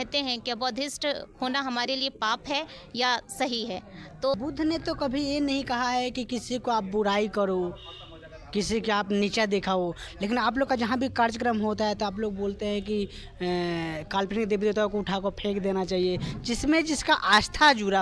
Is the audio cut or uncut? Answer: cut